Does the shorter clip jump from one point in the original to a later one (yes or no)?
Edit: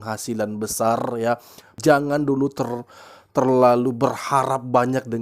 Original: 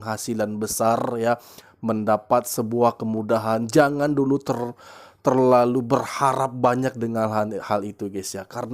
yes